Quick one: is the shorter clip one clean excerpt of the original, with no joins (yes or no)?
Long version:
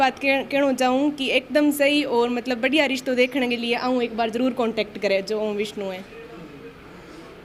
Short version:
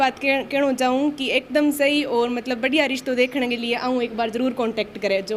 yes